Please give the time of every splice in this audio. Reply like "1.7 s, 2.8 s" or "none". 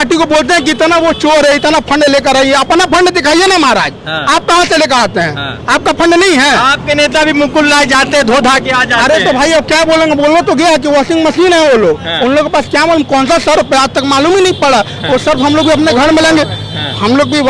none